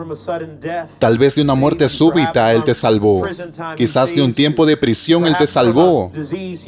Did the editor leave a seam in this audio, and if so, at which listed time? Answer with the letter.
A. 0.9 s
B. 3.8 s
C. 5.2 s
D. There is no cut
A